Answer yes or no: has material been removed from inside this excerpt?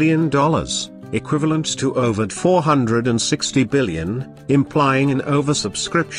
yes